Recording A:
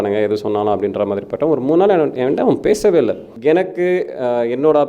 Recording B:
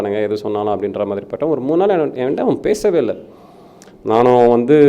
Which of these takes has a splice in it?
A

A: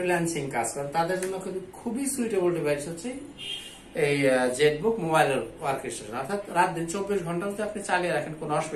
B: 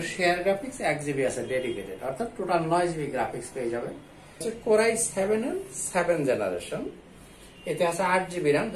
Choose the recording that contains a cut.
B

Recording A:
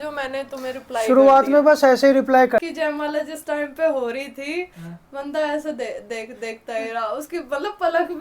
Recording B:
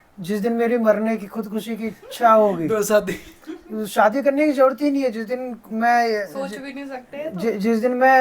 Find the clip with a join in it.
A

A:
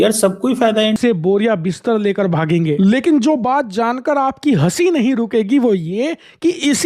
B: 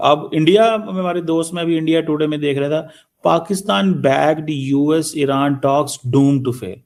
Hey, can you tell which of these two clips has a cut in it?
A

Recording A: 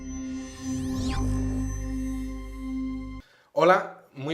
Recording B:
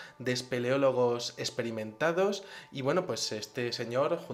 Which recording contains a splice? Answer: A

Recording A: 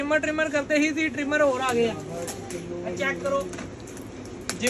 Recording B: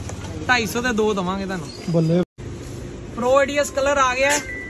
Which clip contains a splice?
B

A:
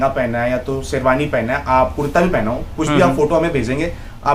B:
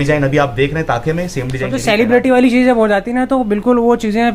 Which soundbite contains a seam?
B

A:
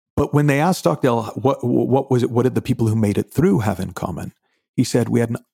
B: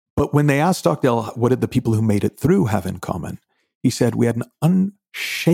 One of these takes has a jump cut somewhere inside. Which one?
B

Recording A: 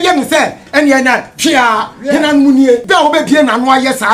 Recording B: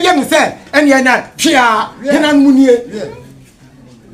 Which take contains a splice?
A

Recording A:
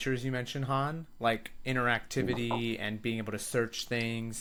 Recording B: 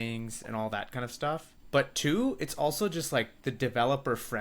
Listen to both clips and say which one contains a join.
B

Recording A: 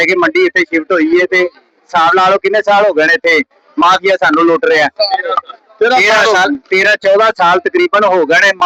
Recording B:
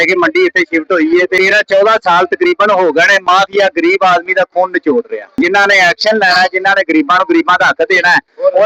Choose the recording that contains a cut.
B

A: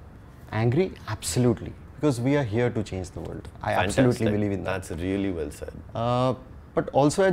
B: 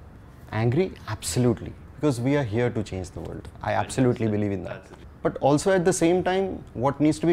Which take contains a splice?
B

